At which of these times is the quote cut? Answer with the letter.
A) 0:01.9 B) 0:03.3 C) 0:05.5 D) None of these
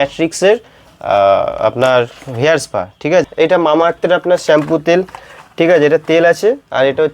B